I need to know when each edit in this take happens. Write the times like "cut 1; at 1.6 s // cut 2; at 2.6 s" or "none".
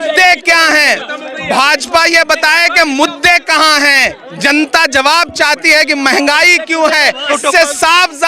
cut 1; at 7.3 s